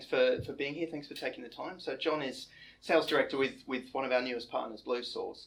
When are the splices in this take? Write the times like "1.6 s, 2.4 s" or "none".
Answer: none